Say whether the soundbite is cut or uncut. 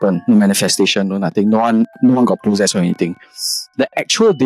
uncut